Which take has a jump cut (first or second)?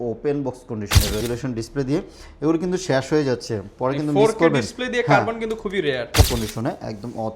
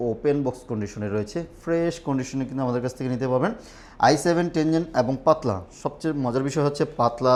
first